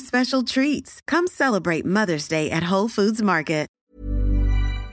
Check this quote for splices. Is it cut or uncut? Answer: cut